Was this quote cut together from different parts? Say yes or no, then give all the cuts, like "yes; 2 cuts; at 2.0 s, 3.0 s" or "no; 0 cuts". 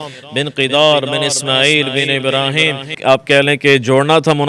yes; 1 cut; at 2.9 s